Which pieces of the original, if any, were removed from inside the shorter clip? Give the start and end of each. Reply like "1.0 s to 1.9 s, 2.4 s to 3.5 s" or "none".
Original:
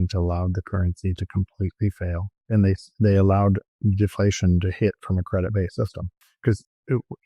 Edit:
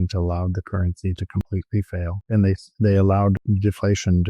1.8 s to 1.9 s, 3.6 s to 3.8 s